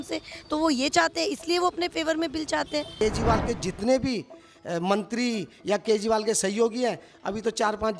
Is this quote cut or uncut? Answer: cut